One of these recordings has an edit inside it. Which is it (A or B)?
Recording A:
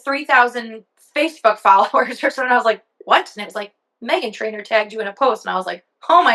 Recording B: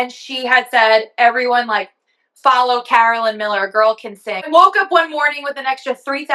B